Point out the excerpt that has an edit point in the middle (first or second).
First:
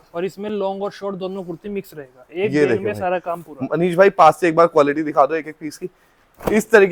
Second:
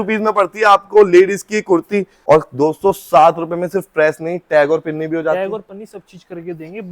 second